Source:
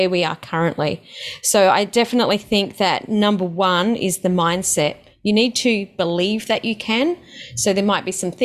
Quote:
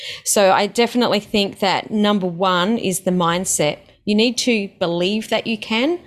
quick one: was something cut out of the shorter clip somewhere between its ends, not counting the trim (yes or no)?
no